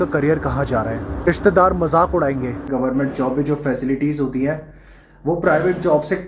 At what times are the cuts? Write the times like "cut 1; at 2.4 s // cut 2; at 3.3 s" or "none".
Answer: cut 1; at 1.3 s // cut 2; at 2.7 s